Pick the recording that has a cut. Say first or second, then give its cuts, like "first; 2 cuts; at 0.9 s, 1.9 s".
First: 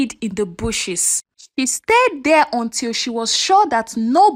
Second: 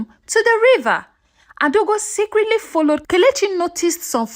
second; 1 cut; at 3.0 s